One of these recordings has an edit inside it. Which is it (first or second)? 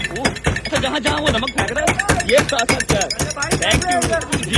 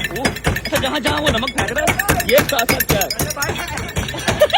second